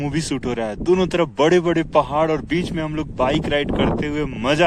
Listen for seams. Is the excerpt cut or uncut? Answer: uncut